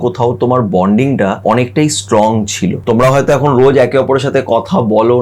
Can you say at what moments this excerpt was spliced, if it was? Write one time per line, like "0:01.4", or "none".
0:01.4
0:02.8